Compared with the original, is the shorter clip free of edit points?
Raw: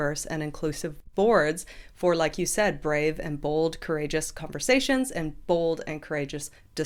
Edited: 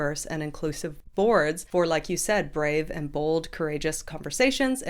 no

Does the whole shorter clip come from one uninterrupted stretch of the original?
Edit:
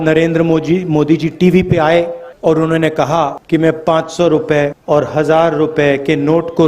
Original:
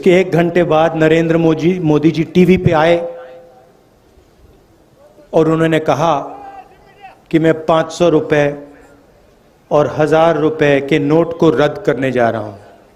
no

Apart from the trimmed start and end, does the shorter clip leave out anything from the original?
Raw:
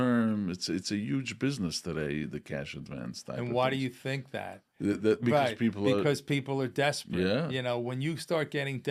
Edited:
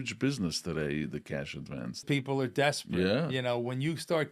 yes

